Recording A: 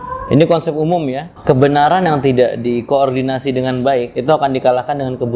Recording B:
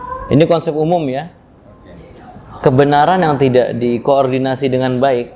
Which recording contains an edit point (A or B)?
A